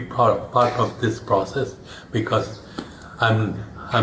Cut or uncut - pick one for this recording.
uncut